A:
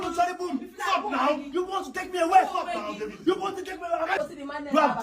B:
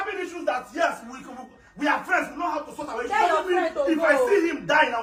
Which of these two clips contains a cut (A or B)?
A